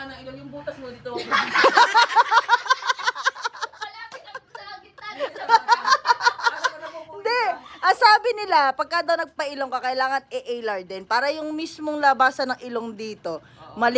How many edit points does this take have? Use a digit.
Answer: 0